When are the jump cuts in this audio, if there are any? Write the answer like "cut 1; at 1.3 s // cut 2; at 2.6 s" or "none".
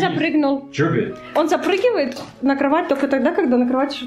cut 1; at 1.1 s

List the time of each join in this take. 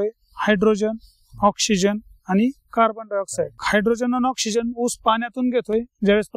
cut 1; at 3.6 s

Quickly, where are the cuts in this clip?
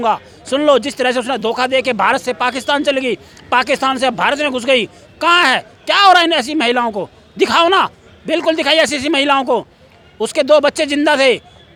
none

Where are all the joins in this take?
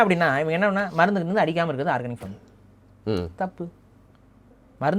none

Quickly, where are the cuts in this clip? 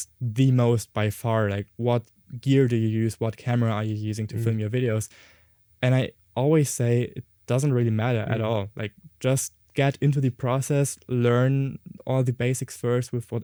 none

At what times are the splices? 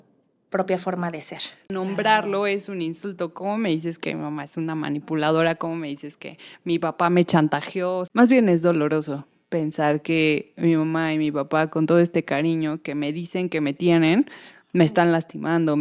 cut 1; at 1.7 s // cut 2; at 8.0 s

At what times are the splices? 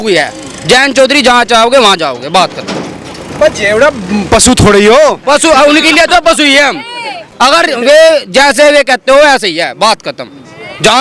none

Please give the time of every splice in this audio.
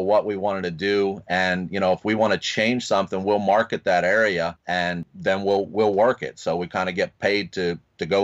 cut 1; at 4.6 s

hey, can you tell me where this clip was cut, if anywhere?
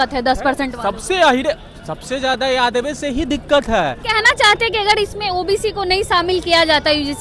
cut 1; at 4.0 s

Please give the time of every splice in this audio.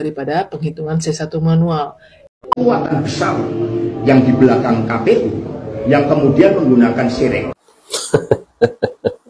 cut 1; at 2.6 s

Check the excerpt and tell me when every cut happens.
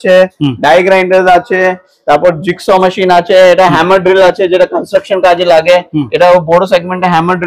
none

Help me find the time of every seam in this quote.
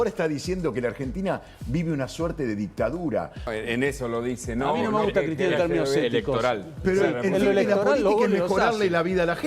cut 1; at 3.5 s

